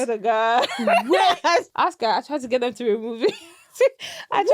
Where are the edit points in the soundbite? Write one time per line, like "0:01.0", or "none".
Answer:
0:01.7